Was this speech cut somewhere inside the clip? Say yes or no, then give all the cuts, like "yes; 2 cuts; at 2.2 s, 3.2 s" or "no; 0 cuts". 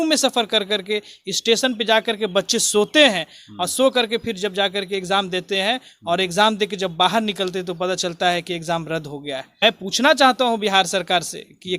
yes; 1 cut; at 9.5 s